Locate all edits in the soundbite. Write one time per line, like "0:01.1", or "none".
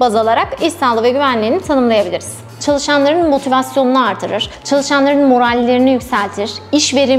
0:02.6

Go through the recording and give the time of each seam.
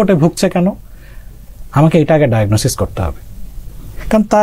none

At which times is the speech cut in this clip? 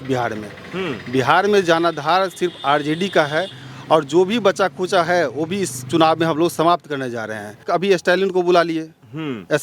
0:07.6

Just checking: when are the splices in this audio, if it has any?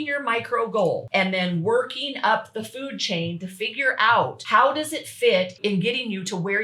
0:01.0
0:04.4
0:05.5

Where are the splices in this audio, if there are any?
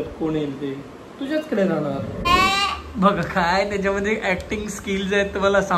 0:02.3

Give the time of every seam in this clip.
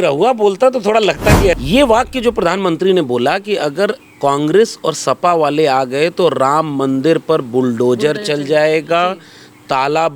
0:01.6

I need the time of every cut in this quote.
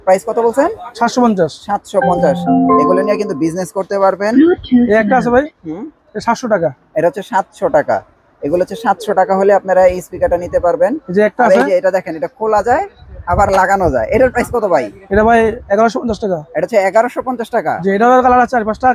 none

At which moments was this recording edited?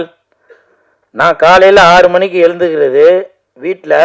none

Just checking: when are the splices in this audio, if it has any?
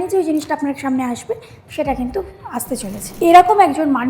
0:03.0

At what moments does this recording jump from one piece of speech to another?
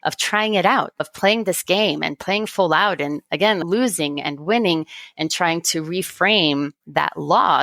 0:01.1

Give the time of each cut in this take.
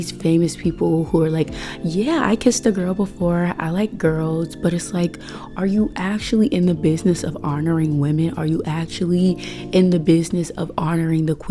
none

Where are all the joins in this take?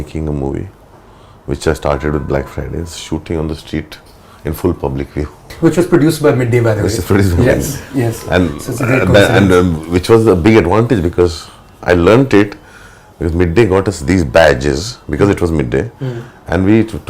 0:05.5

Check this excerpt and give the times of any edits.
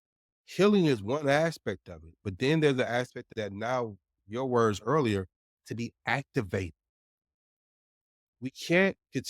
0:03.2
0:04.1

